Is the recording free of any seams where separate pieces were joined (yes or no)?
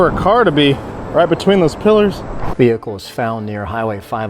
no